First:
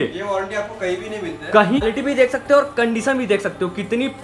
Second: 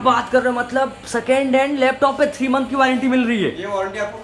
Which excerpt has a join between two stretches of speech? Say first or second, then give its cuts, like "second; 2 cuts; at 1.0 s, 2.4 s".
first; 1 cut; at 1.8 s